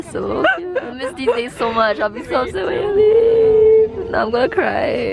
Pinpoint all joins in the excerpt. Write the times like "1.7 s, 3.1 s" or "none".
none